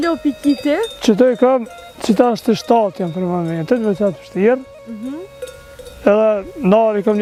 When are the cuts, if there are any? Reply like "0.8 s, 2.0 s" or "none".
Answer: none